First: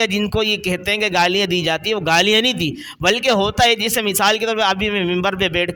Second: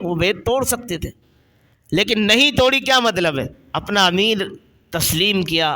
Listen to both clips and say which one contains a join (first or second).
second